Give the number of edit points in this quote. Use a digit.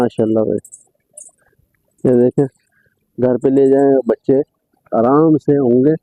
0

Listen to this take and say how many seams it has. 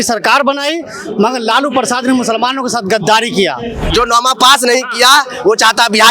1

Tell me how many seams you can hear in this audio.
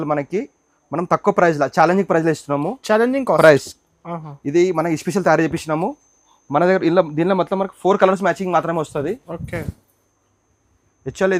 0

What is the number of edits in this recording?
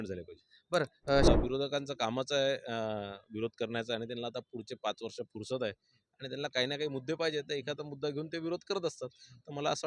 1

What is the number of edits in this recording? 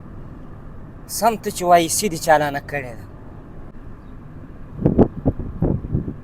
1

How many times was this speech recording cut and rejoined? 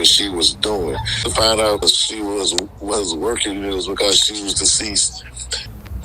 1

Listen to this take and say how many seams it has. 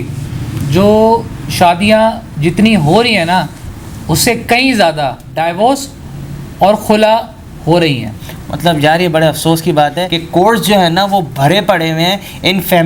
0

